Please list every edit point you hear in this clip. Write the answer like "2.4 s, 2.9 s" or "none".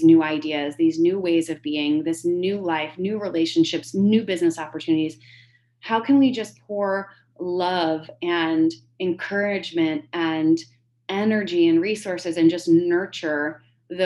none